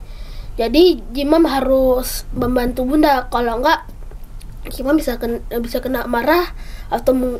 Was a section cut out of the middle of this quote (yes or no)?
no